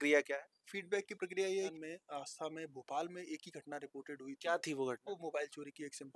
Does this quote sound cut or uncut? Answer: cut